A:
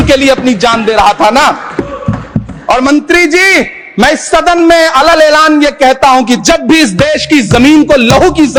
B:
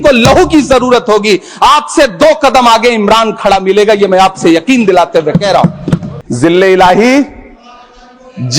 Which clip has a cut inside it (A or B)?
B